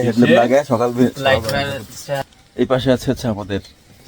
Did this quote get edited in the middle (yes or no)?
yes